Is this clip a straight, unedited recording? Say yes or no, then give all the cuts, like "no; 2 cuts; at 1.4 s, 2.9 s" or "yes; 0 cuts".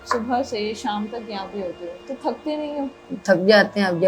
no; 2 cuts; at 2.0 s, 3.1 s